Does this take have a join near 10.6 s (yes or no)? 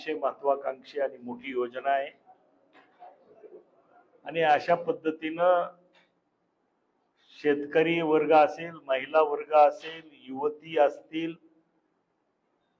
no